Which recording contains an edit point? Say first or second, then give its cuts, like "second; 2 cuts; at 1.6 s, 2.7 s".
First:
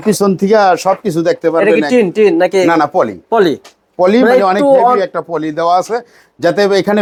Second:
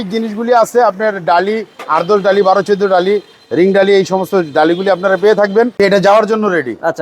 second; 1 cut; at 5.7 s